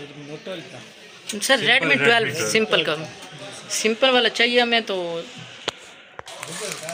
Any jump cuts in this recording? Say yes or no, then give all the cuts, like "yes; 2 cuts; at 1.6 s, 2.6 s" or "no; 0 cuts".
no; 0 cuts